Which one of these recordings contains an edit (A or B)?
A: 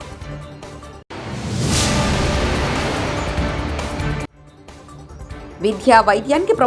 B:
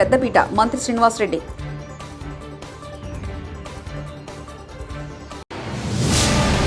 A